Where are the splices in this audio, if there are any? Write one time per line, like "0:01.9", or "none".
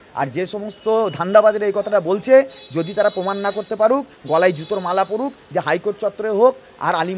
none